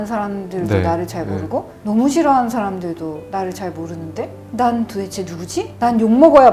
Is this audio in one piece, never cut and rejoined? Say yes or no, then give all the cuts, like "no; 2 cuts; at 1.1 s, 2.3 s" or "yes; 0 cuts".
yes; 0 cuts